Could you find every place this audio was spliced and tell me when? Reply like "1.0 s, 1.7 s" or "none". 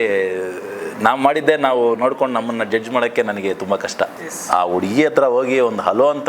4.1 s